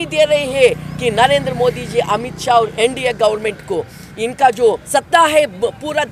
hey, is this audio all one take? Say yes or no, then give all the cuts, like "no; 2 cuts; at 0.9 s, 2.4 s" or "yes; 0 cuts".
no; 1 cut; at 4.8 s